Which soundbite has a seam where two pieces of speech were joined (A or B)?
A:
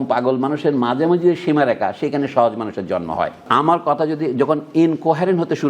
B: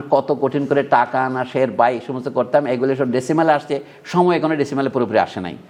A